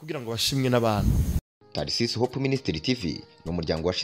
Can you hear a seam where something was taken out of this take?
yes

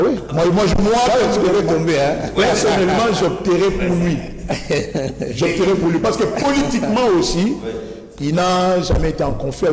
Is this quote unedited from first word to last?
yes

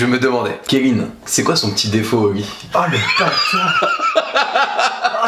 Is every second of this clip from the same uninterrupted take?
yes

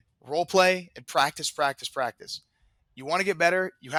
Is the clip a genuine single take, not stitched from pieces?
yes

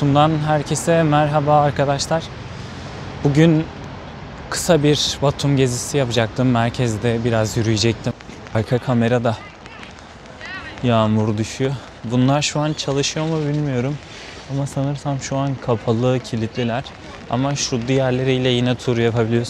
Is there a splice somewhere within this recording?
yes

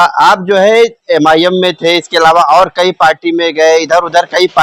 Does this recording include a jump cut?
no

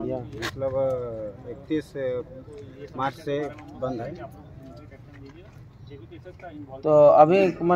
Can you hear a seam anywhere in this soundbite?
no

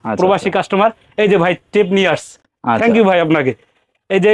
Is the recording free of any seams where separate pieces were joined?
yes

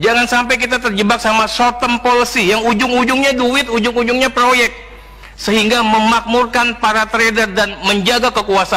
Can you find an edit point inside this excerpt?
no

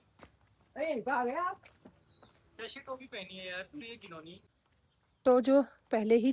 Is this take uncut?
no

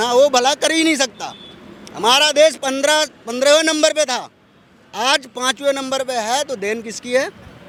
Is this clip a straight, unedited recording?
yes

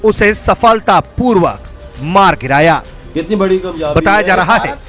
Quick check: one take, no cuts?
yes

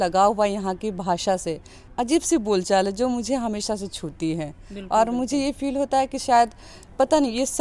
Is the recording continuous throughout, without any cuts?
no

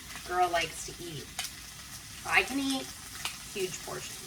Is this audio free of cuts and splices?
yes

